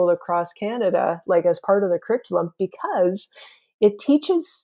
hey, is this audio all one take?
yes; 0 cuts

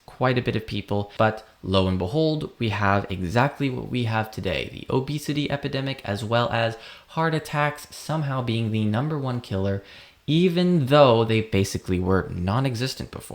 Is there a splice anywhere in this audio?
yes; 1 cut; at 1.2 s

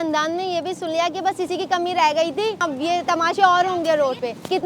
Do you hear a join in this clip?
yes; 1 cut; at 2.6 s

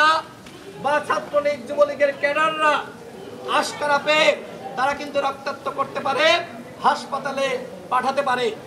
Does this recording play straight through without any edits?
yes; 0 cuts

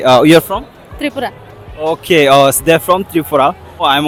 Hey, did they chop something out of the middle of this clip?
no; 0 cuts

